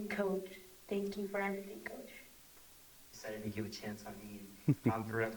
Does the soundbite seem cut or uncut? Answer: cut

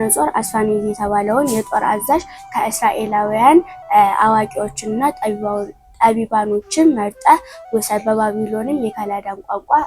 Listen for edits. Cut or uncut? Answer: uncut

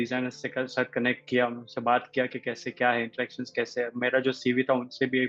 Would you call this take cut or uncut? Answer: uncut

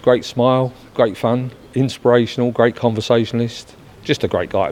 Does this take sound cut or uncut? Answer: cut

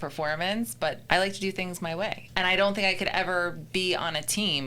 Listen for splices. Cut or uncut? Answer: cut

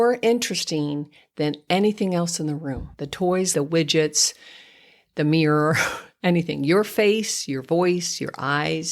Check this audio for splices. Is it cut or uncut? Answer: cut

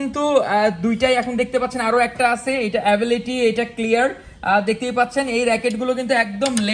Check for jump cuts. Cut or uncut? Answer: uncut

